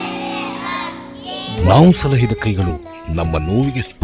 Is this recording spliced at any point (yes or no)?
no